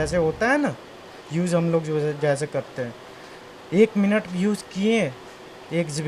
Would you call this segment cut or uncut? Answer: uncut